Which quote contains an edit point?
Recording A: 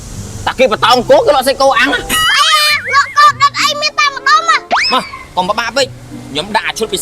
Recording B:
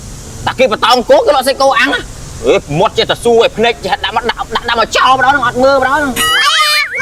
A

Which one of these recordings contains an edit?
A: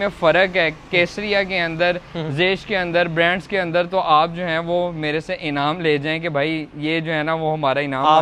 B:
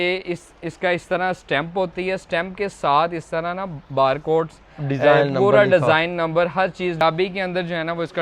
B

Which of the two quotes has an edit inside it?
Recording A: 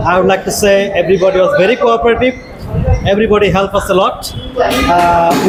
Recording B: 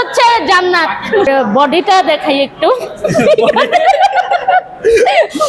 B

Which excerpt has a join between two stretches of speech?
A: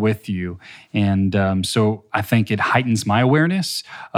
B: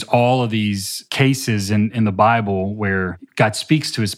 B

